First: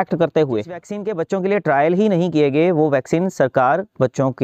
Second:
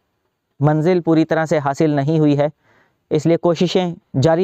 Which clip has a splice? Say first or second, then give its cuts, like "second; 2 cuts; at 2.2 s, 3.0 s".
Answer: first; 1 cut; at 1.0 s